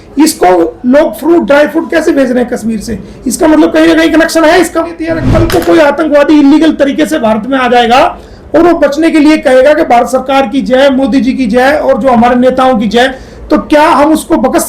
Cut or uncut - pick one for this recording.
cut